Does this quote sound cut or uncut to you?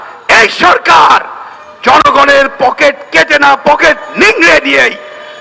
uncut